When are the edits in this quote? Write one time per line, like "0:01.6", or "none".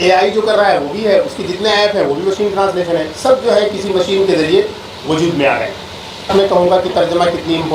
0:06.3